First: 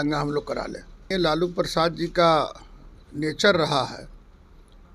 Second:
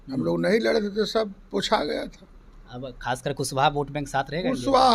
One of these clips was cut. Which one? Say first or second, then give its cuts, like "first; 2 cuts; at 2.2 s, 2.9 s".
first; 1 cut; at 1.1 s